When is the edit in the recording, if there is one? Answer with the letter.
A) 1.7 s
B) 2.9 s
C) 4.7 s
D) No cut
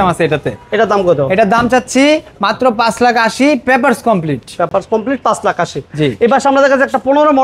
D